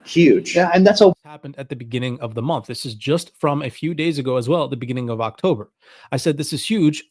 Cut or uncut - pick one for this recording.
cut